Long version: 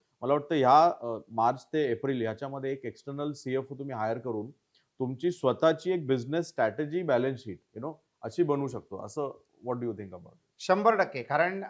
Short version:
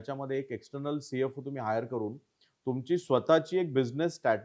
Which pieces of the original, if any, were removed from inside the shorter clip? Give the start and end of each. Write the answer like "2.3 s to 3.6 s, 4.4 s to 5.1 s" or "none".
none